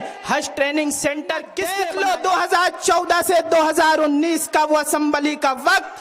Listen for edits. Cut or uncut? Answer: cut